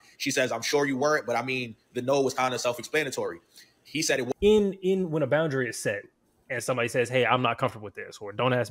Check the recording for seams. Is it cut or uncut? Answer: cut